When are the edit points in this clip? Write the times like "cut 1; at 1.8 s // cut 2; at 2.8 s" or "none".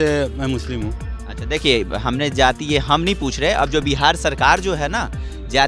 none